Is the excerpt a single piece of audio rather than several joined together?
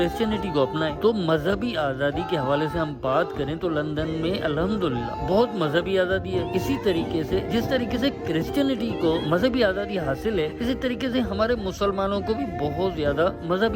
yes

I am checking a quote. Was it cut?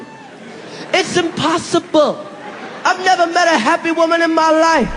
no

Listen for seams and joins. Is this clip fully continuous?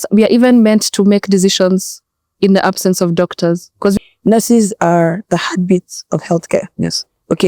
no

